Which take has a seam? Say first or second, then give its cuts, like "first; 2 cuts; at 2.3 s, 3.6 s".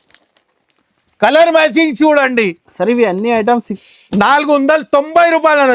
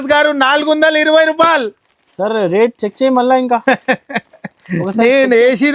first; 1 cut; at 3.7 s